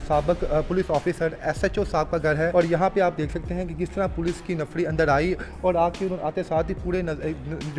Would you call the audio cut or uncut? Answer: cut